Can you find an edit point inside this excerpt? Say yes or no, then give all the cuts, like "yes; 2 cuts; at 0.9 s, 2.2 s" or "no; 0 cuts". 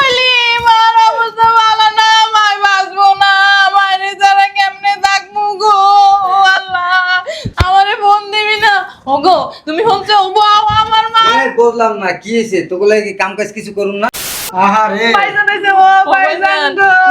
yes; 1 cut; at 14.4 s